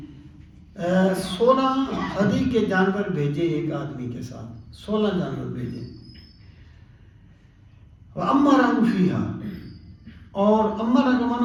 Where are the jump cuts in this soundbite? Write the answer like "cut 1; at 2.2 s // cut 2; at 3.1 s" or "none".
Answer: none

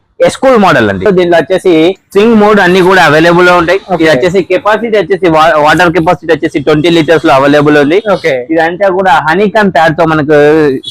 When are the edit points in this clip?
cut 1; at 1.1 s // cut 2; at 2.0 s

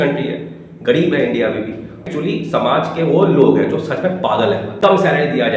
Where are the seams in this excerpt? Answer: cut 1; at 2.1 s // cut 2; at 4.7 s

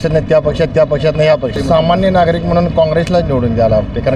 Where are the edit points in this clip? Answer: cut 1; at 1.6 s

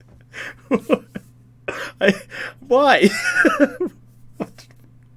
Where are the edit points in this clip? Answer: none

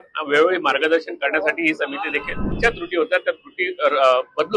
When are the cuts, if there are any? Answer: cut 1; at 2.5 s

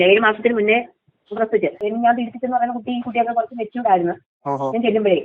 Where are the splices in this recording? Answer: cut 1; at 1.8 s

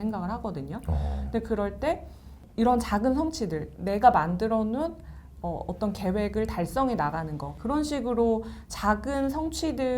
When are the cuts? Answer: cut 1; at 2.4 s // cut 2; at 7.5 s

